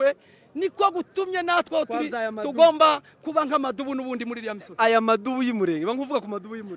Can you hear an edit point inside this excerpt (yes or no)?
no